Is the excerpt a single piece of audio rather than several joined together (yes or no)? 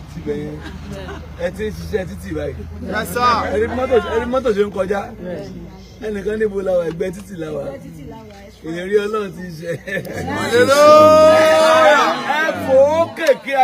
yes